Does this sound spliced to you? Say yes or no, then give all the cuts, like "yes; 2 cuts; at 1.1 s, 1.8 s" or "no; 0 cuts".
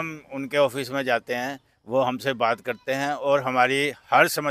no; 0 cuts